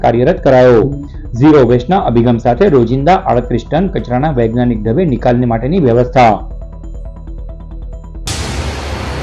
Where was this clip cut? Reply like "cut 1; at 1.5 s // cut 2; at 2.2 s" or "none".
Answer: cut 1; at 8.2 s